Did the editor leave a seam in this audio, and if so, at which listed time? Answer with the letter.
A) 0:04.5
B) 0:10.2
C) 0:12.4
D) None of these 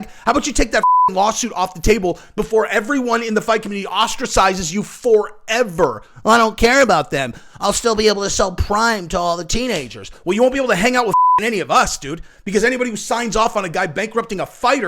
B